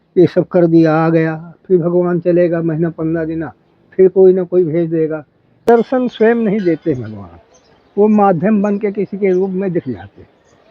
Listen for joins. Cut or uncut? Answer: cut